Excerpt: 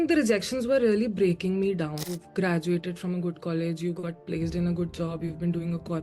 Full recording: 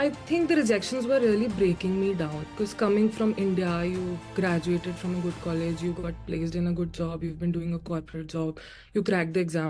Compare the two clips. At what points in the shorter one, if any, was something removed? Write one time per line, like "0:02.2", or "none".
0:02.1